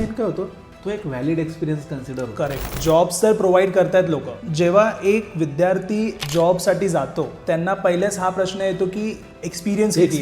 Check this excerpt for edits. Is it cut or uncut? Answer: cut